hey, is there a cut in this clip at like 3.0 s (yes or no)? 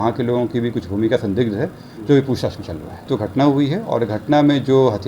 yes